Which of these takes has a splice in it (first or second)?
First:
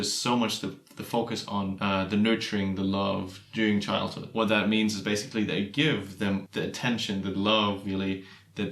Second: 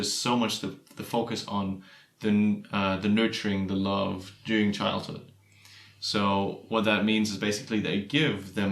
first